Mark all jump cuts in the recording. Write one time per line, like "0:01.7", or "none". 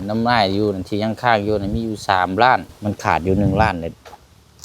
0:02.7